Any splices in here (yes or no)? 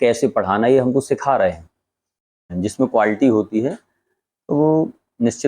yes